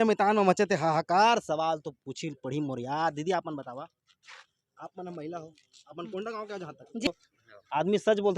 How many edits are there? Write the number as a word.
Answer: one